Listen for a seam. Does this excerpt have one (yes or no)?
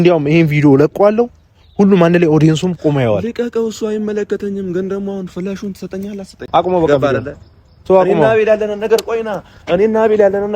yes